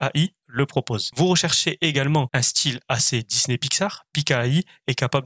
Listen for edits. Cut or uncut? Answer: cut